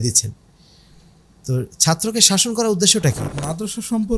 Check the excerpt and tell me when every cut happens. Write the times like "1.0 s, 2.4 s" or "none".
3.3 s